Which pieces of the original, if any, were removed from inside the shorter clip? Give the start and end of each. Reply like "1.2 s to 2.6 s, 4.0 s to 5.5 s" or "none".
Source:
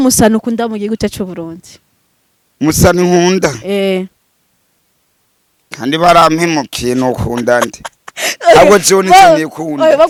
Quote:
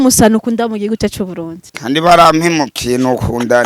1.6 s to 5.6 s